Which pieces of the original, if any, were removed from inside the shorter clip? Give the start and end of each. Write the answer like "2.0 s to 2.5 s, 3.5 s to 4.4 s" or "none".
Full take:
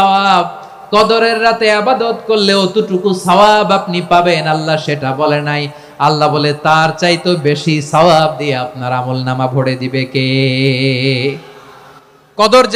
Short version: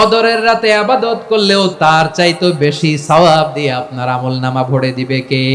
2.5 s to 6.3 s

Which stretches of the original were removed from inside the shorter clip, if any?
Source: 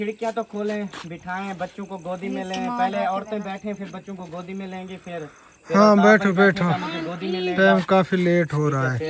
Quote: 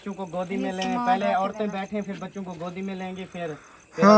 none

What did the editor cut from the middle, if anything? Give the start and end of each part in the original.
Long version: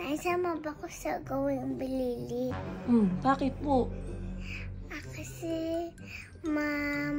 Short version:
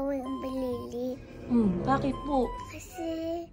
4.0 s to 5.1 s

